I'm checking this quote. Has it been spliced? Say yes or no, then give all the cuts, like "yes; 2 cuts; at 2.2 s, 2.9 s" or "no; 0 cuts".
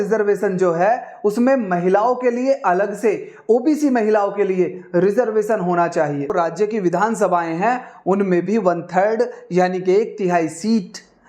yes; 1 cut; at 6.3 s